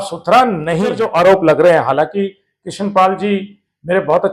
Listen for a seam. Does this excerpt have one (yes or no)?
yes